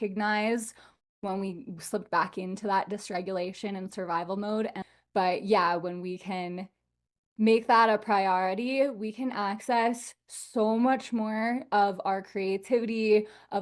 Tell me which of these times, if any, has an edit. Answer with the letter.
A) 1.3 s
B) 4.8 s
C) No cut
B